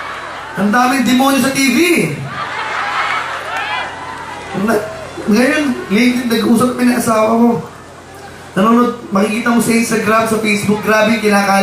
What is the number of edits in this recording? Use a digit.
1